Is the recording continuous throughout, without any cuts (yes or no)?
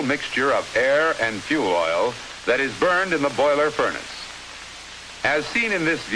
yes